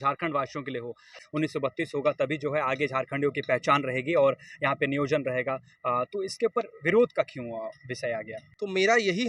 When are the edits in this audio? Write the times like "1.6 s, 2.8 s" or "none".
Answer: 1.2 s, 8.4 s